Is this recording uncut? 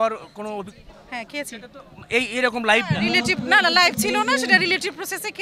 yes; 0 cuts

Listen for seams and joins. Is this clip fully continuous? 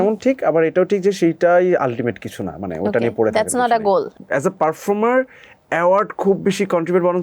no; 1 cut; at 4.2 s

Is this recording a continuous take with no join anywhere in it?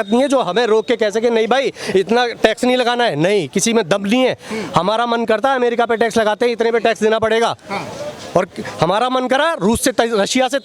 yes; 0 cuts

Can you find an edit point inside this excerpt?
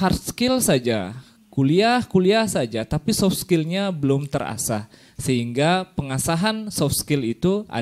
no; 0 cuts

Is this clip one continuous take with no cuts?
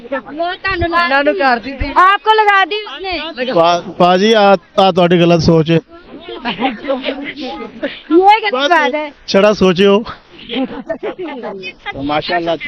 yes; 0 cuts

